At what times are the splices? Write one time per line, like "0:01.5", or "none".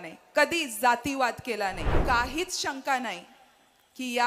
0:02.0

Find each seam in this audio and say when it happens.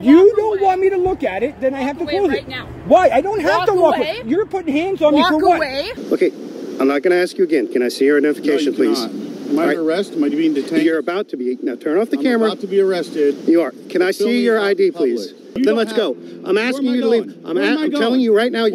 0:05.9
0:15.5

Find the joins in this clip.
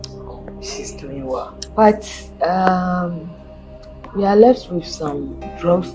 0:01.6

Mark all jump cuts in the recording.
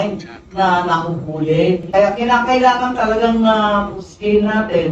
0:01.9

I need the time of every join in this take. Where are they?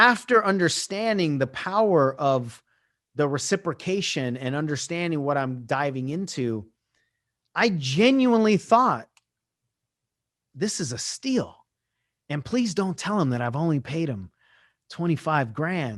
none

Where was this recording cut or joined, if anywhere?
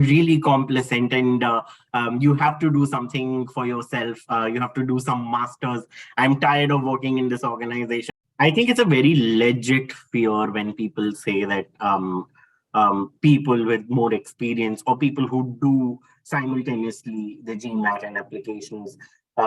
0:08.1

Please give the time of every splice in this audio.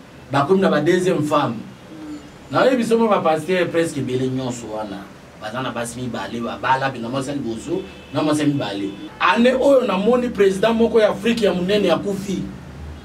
0:09.0

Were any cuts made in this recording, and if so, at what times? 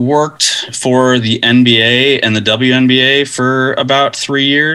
none

